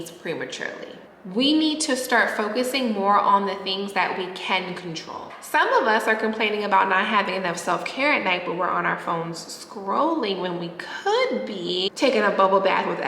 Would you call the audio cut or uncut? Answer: cut